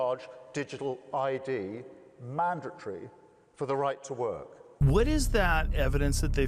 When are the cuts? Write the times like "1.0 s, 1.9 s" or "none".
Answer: 4.6 s